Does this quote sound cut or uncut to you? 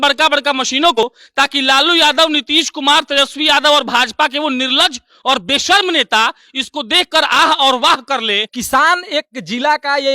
cut